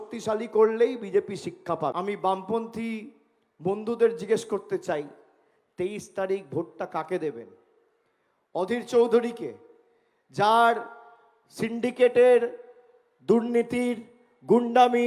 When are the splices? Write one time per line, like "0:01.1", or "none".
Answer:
0:01.9